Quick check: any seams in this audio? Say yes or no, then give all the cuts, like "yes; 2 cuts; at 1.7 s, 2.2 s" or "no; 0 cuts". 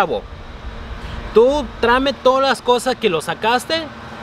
no; 0 cuts